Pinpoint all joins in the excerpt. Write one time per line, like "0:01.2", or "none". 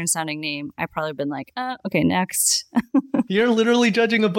none